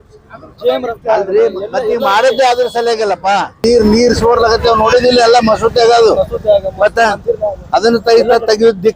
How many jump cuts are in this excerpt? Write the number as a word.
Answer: one